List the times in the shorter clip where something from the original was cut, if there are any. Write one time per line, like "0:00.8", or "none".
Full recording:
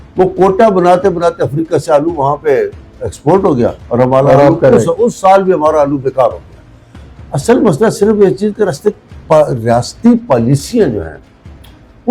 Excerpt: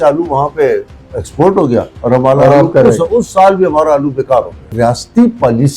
0:04.7